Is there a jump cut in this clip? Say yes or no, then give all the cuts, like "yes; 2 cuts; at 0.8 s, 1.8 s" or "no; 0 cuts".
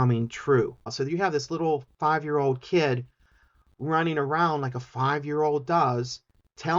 yes; 1 cut; at 0.9 s